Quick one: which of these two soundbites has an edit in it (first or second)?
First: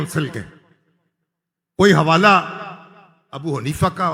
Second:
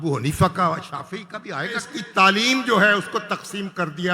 second